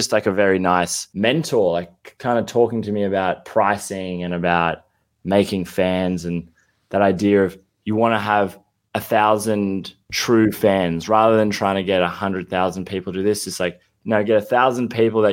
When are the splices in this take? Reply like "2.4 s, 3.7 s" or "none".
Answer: 1.0 s

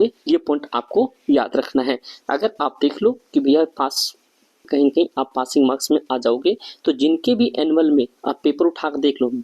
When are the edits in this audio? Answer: 4.6 s

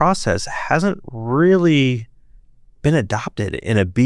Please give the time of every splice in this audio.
none

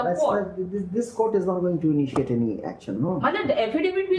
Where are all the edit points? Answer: none

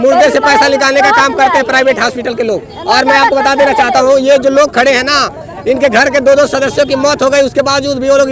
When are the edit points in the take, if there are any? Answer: none

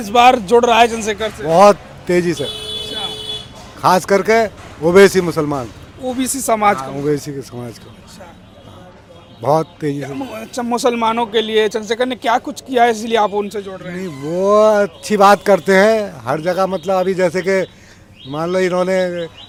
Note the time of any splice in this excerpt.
none

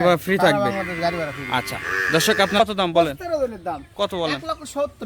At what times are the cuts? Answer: 2.6 s

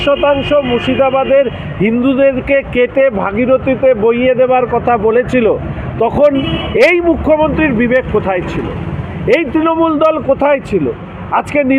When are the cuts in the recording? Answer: none

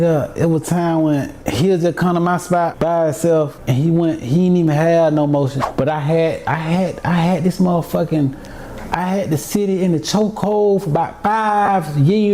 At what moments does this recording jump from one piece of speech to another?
1.4 s, 2.7 s, 3.6 s, 5.6 s

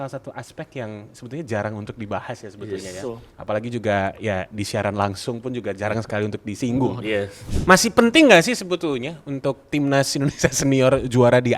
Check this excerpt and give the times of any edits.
7.4 s

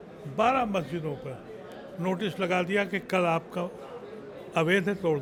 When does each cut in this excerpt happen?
none

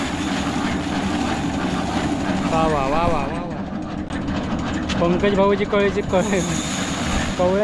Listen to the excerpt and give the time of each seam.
4.1 s

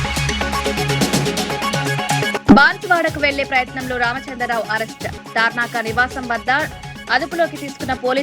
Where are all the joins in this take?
2.4 s

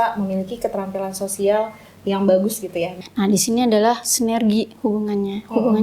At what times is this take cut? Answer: 2.9 s

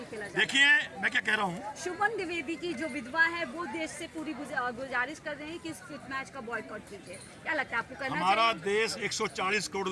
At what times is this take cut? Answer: none

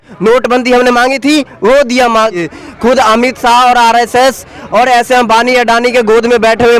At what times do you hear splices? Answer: 2.5 s

